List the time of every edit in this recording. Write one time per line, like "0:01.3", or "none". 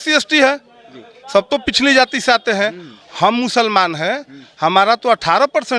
none